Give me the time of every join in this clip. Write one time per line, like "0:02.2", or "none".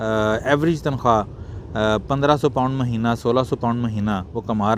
none